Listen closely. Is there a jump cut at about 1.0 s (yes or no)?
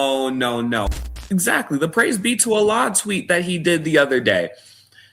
yes